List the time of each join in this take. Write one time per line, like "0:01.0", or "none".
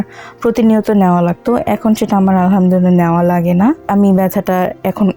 0:03.8